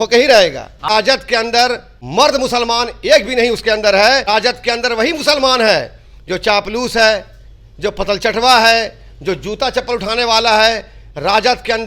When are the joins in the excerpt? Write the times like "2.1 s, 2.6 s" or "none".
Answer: 0.9 s, 1.9 s, 4.2 s